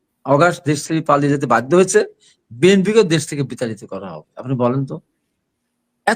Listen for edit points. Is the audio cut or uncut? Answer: uncut